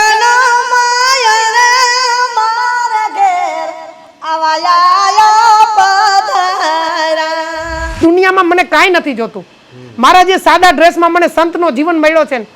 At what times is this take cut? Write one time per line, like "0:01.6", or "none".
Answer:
0:08.0